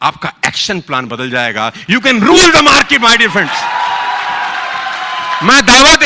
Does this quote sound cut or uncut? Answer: uncut